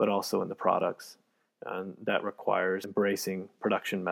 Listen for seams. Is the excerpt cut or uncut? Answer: cut